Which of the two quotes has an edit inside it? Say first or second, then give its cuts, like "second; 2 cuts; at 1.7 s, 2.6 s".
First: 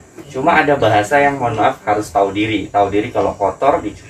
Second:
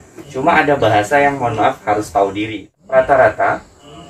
second; 1 cut; at 2.6 s